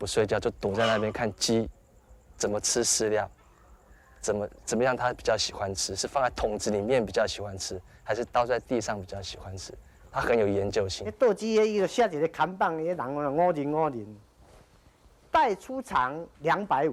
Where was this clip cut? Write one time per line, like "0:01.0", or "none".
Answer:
0:11.0